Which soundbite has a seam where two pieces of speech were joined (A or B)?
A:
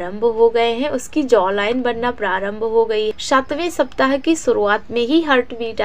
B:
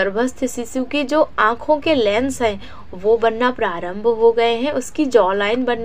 A